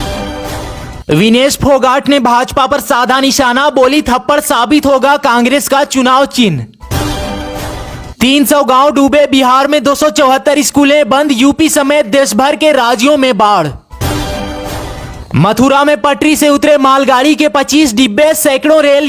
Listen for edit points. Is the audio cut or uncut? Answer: cut